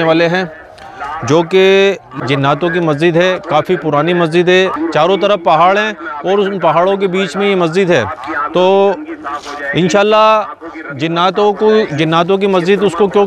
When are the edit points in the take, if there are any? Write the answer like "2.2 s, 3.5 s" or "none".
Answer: 2.2 s, 4.7 s